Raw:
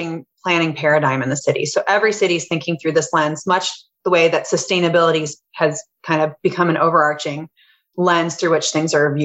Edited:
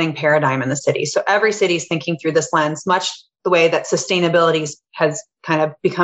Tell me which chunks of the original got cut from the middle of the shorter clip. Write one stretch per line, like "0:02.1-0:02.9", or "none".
none